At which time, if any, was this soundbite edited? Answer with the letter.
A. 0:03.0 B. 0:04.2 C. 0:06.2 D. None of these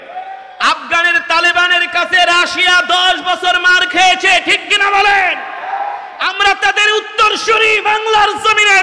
D